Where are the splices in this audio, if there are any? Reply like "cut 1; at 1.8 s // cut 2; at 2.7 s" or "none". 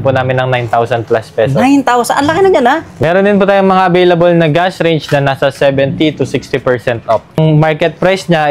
cut 1; at 2.9 s // cut 2; at 7.4 s